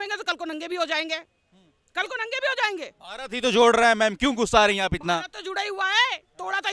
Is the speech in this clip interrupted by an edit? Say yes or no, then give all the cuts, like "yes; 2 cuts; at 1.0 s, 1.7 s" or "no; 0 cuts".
no; 0 cuts